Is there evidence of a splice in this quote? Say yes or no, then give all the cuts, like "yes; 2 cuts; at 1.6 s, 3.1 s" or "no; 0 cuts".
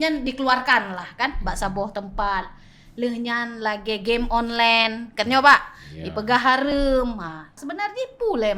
yes; 1 cut; at 7.5 s